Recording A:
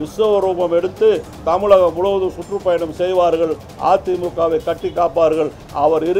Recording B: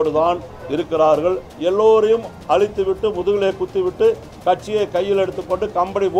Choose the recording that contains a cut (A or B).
B